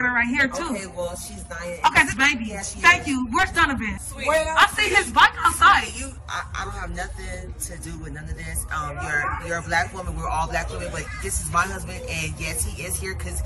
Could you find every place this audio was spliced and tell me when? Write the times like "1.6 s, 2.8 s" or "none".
2.6 s, 3.9 s, 6.2 s